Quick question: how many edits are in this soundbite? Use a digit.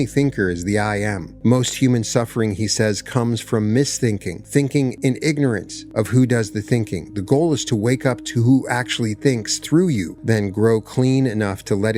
5